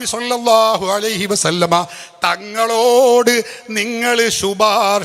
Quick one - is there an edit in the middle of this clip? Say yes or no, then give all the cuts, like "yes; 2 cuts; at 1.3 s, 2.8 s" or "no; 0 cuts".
no; 0 cuts